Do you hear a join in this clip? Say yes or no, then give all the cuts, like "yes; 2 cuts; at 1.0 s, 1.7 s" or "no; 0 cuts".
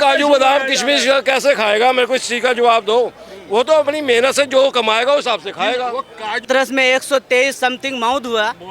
yes; 1 cut; at 6.4 s